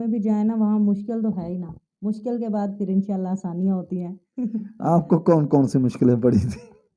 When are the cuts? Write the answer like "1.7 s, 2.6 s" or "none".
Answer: none